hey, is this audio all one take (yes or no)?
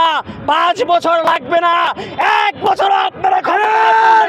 yes